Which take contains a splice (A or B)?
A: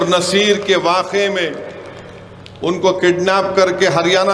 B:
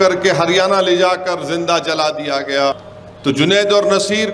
B